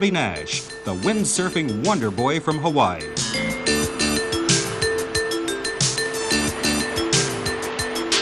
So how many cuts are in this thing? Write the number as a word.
one